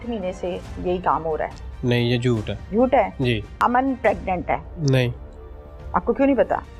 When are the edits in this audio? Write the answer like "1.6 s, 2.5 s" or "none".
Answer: 2.6 s, 3.5 s, 4.7 s